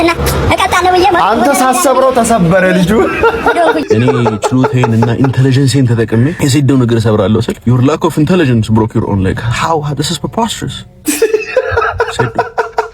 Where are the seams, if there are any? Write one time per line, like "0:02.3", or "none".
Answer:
0:03.8
0:06.4
0:07.5